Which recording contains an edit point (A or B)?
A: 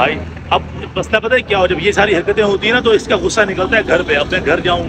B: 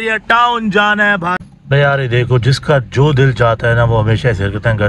B